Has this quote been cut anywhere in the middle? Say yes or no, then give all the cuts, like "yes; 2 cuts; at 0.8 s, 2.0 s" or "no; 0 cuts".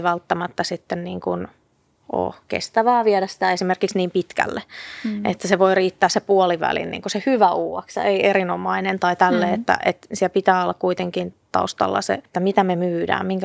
yes; 1 cut; at 12.3 s